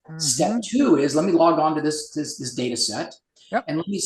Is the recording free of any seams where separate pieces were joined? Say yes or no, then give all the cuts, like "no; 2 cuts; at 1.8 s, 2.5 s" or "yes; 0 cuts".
yes; 0 cuts